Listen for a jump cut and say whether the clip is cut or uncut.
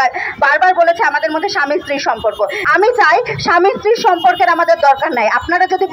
cut